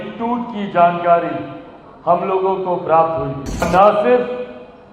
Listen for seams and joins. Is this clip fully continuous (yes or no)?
no